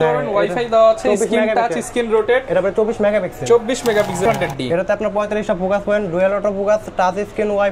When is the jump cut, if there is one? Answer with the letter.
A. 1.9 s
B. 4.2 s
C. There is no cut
B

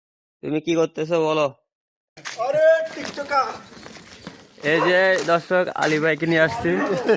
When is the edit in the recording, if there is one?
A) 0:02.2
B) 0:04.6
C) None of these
A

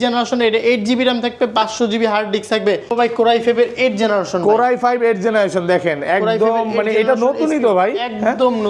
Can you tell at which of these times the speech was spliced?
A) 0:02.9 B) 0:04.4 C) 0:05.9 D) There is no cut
A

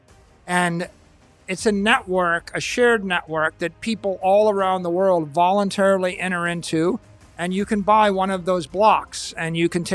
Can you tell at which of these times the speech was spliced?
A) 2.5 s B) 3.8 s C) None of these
C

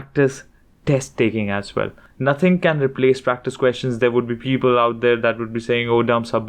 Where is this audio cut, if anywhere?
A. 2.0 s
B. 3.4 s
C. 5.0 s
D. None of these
A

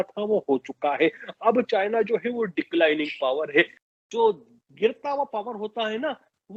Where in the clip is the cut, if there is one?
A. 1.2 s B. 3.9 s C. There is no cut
C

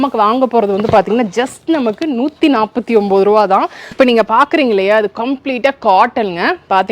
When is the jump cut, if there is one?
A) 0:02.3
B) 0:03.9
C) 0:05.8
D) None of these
B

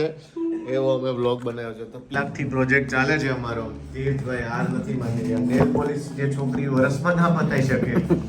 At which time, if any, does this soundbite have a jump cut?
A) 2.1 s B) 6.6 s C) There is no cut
A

